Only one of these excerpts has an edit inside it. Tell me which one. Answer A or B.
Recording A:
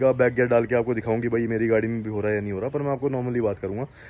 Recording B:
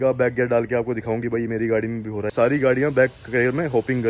B